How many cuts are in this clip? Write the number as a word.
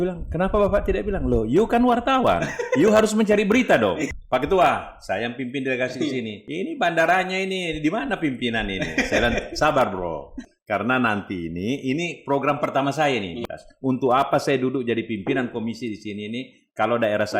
four